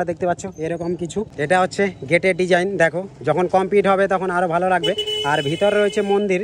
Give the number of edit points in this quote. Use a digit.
0